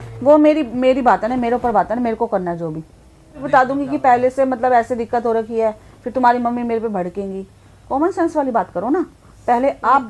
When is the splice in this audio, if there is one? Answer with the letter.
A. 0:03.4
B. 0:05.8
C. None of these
A